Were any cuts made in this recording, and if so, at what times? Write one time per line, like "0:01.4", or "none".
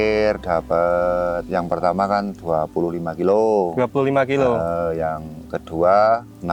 none